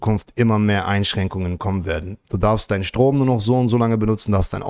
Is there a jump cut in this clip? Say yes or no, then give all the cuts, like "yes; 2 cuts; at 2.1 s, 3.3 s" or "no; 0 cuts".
no; 0 cuts